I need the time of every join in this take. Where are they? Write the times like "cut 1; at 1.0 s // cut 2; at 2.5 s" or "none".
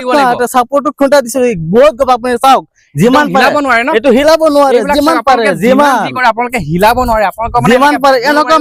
none